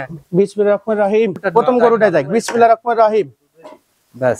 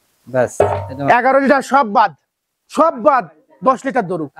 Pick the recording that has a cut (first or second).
first